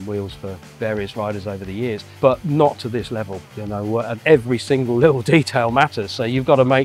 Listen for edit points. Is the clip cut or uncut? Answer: cut